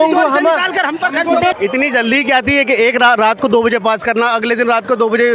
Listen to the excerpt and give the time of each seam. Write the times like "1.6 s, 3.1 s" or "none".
1.5 s